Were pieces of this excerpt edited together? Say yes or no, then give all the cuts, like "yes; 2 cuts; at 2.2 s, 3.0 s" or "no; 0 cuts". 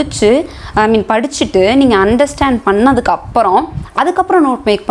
no; 0 cuts